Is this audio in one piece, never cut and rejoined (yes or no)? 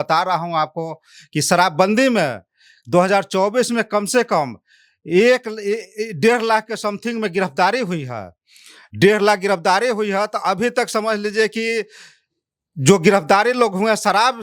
yes